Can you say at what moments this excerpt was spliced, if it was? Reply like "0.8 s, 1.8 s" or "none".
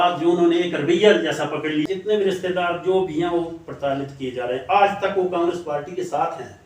1.8 s

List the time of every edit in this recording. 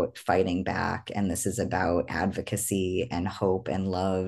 none

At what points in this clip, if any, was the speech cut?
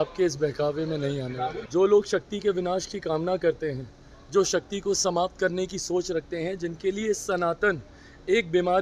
1.6 s

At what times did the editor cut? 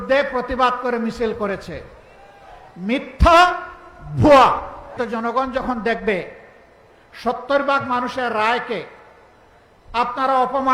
4.9 s

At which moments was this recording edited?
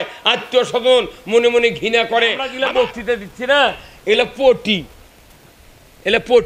2.5 s

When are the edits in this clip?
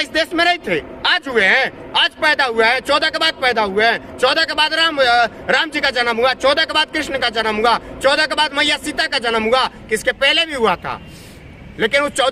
none

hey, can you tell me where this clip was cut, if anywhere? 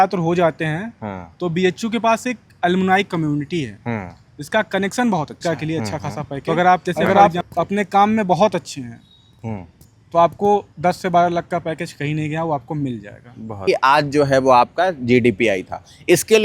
7.0 s, 13.7 s

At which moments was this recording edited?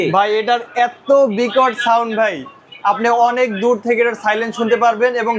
none

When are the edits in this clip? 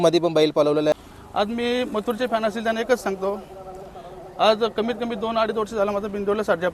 0.9 s

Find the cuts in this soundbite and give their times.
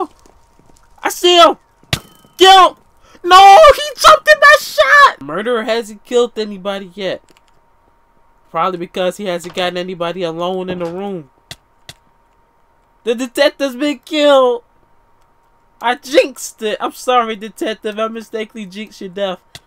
5.3 s

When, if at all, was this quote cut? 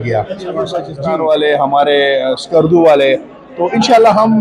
0.9 s

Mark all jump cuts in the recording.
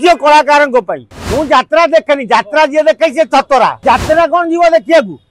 3.8 s

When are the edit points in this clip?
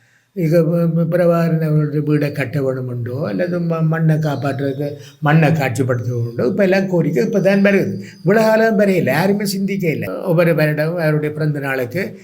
10.1 s

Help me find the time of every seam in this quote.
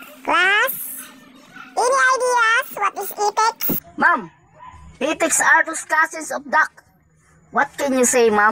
3.9 s

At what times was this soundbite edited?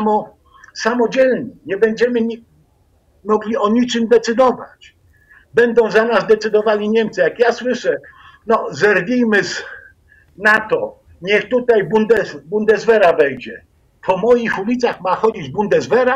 none

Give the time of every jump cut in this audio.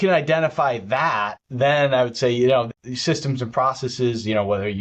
1.4 s, 2.7 s

